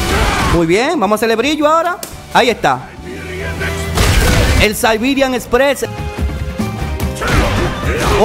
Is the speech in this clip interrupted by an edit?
yes; 1 cut; at 5.8 s

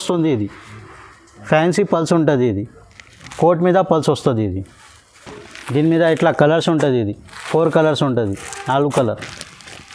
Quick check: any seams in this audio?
no; 0 cuts

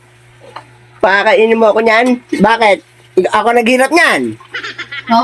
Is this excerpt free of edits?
yes; 0 cuts

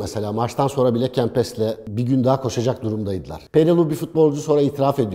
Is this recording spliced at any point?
yes; 1 cut; at 3.3 s

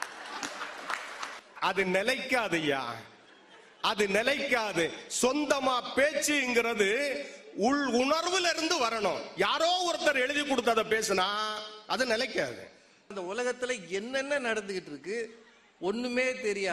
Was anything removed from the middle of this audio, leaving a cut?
yes; 2 cuts; at 1.4 s, 13.0 s

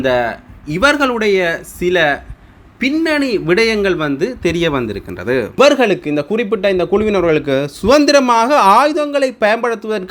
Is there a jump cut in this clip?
yes; 1 cut; at 5.5 s

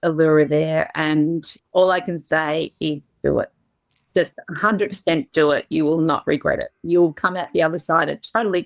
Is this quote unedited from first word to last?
no; 1 cut; at 1.5 s

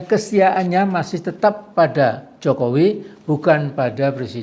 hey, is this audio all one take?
yes; 0 cuts

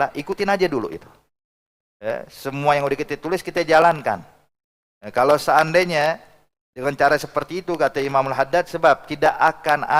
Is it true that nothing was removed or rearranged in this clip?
yes; 0 cuts

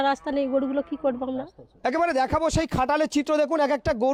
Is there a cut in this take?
no; 0 cuts

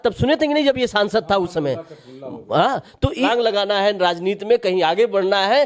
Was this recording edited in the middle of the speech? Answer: yes; 1 cut; at 3.3 s

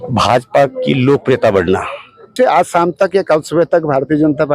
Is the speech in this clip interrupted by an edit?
yes; 1 cut; at 2.3 s

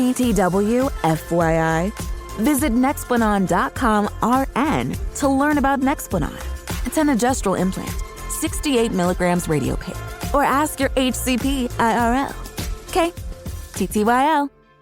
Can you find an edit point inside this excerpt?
no; 0 cuts

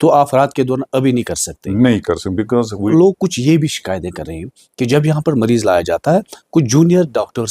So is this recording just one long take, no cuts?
no; 1 cut; at 2.9 s

